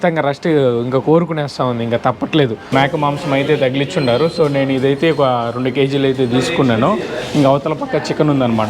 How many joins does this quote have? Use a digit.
1